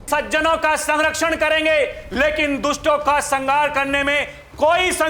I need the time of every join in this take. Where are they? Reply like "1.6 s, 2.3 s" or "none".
none